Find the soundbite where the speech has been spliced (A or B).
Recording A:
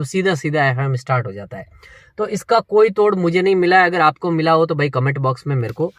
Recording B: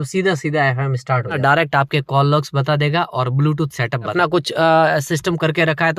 B